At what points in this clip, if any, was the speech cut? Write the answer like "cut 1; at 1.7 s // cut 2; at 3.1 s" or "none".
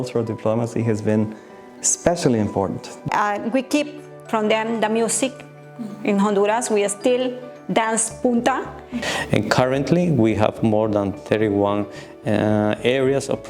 cut 1; at 3.0 s // cut 2; at 9.0 s